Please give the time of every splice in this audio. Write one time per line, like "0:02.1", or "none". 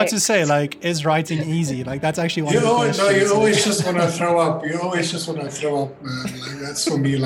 none